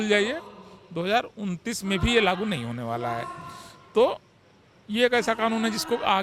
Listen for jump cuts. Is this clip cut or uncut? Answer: uncut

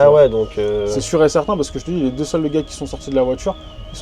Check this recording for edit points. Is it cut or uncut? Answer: uncut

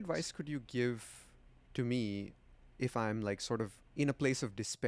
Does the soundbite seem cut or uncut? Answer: cut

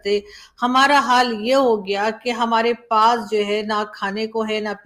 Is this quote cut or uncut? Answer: uncut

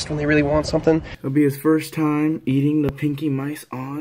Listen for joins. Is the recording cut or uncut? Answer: cut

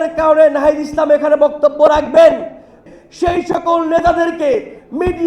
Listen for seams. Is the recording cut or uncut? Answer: cut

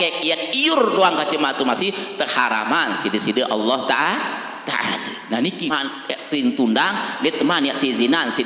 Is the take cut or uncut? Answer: cut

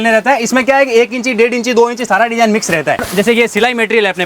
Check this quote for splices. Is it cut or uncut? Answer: cut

